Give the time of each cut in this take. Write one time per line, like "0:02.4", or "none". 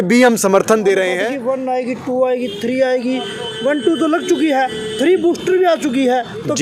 0:01.2

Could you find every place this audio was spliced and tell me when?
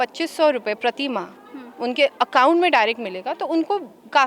none

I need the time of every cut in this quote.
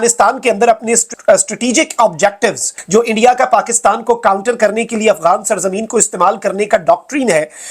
0:01.1
0:02.7

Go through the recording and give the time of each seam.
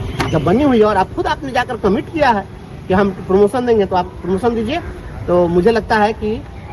none

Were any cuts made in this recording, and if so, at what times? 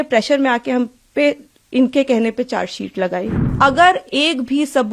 0:03.4

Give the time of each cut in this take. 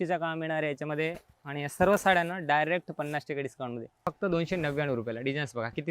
0:04.1

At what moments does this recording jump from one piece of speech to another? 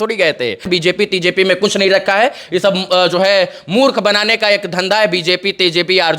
0:00.9

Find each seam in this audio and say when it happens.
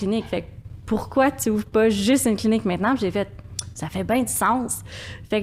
none

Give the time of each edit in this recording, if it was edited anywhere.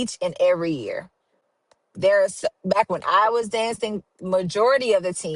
none

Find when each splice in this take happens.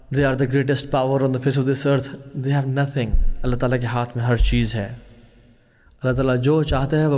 none

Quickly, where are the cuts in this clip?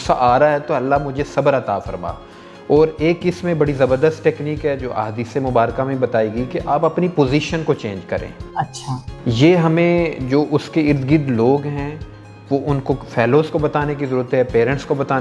none

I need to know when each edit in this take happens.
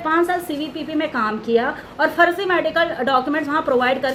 none

